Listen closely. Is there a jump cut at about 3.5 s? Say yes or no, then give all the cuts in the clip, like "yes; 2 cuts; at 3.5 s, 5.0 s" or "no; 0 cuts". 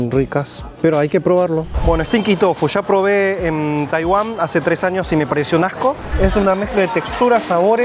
no; 2 cuts; at 1.7 s, 6.1 s